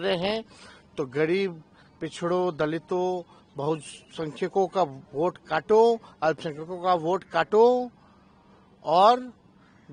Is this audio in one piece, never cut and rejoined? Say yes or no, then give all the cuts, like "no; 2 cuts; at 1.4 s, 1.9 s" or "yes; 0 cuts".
yes; 0 cuts